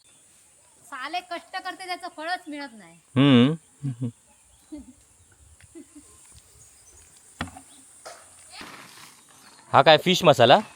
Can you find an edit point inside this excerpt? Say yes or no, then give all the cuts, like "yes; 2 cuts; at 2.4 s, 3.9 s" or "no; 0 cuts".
yes; 1 cut; at 8.6 s